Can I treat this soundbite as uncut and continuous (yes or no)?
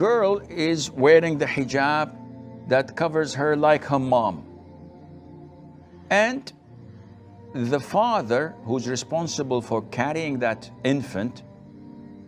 no